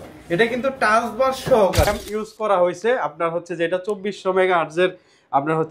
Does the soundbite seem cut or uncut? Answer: cut